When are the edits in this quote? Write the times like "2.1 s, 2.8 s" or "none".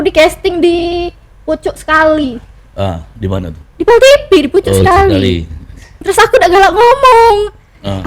6.0 s